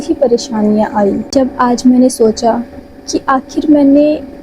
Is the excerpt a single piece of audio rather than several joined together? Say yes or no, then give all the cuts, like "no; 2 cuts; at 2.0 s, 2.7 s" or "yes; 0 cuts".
no; 1 cut; at 1.3 s